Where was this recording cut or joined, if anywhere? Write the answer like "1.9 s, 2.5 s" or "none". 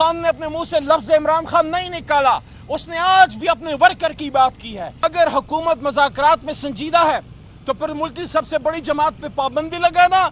5.0 s